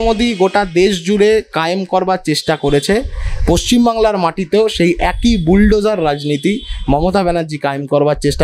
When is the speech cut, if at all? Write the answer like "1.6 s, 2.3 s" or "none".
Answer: none